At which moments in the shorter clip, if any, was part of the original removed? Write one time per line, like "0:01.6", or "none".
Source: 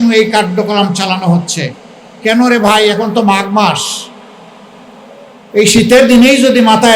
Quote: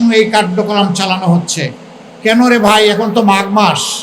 none